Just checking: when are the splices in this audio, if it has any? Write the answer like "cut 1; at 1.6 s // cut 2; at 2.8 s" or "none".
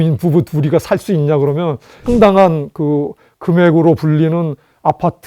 cut 1; at 1.9 s